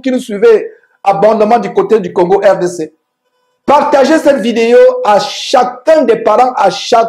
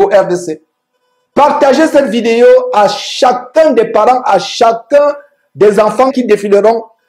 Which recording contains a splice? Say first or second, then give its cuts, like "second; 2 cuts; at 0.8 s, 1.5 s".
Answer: second; 1 cut; at 6.1 s